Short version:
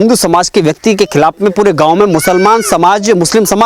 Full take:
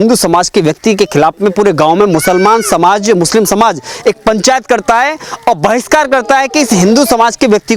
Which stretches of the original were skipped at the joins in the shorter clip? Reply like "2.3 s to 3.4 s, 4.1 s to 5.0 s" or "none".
none

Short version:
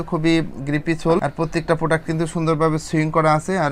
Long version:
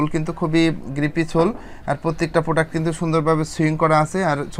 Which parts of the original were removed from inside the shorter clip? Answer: 1.5 s to 1.9 s

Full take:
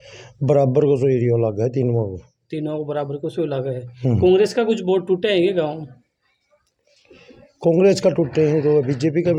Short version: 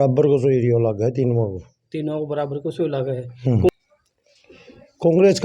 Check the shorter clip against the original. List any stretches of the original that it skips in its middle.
4.3 s to 6.3 s

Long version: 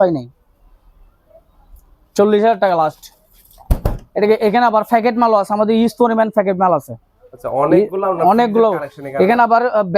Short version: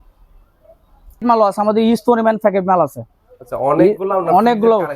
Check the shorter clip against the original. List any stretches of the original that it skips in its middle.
1.9 s to 5.1 s

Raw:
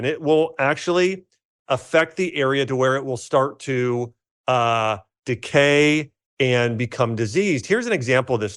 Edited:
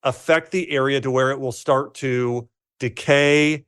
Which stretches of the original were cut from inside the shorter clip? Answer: 4.3 s to 5.1 s

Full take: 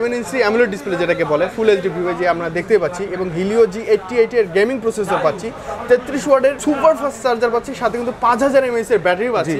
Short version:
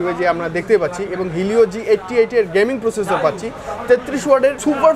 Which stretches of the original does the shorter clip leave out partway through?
none

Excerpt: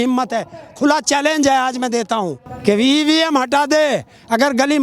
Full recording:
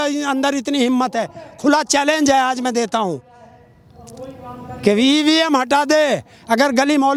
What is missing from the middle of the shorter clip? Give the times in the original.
3.3 s to 4.6 s

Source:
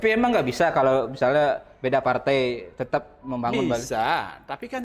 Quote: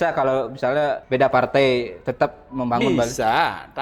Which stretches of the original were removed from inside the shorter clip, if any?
1.6 s to 1.7 s

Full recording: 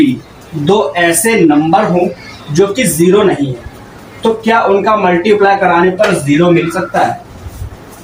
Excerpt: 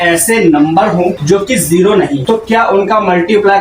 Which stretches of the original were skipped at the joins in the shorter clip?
2.1 s to 2.5 s, 3.5 s to 4.1 s

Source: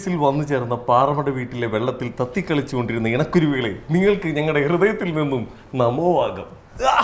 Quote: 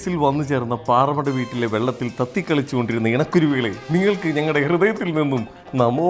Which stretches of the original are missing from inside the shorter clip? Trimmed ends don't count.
none

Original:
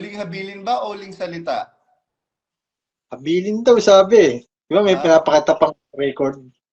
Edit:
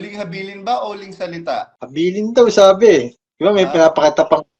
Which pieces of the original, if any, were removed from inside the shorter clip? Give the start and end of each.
1.8 s to 3.1 s

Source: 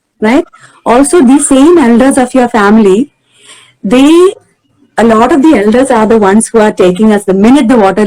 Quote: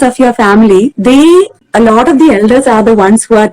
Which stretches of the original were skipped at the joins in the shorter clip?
3.1 s to 3.8 s, 4.5 s to 4.8 s

